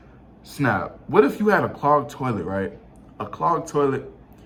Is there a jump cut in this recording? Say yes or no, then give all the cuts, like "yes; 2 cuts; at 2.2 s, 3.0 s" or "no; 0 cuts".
no; 0 cuts